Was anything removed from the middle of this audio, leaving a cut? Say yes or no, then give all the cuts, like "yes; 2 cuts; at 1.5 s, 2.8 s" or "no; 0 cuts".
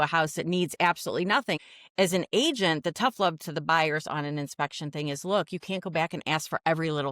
yes; 1 cut; at 1.6 s